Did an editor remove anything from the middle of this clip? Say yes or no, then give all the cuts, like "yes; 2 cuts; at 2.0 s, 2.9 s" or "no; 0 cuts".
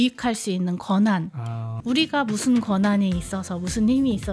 yes; 1 cut; at 1.6 s